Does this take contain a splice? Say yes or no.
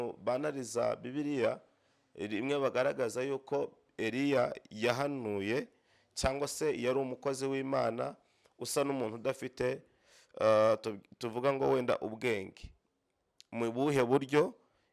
no